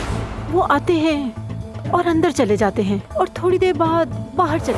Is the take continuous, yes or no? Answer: yes